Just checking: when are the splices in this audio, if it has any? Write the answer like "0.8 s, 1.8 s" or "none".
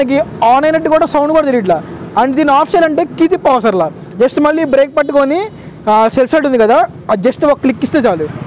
none